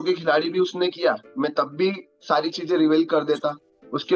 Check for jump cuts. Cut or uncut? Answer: uncut